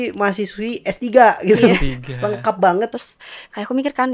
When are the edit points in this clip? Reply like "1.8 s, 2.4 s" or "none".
2.9 s